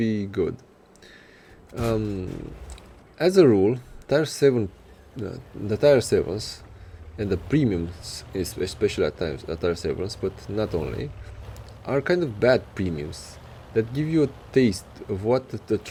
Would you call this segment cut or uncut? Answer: uncut